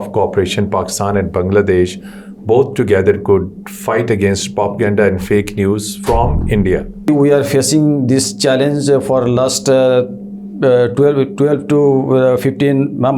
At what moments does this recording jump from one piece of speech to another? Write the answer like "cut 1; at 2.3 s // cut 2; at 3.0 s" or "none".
cut 1; at 7.1 s